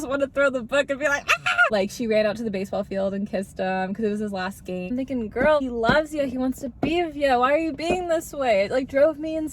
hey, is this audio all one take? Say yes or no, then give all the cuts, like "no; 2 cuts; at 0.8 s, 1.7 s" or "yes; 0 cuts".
no; 2 cuts; at 1.7 s, 4.9 s